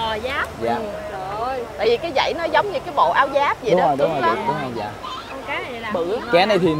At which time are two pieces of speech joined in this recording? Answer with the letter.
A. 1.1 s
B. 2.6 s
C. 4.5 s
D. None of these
D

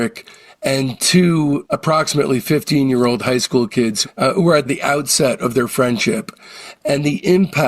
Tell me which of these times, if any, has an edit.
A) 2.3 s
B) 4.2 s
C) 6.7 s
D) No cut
C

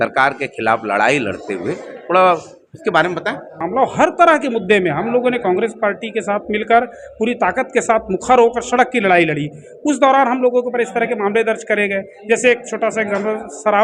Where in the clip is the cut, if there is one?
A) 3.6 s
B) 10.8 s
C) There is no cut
A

